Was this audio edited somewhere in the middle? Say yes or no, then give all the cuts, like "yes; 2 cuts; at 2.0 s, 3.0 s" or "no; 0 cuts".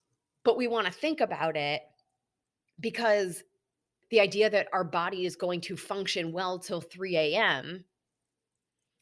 yes; 1 cut; at 4.0 s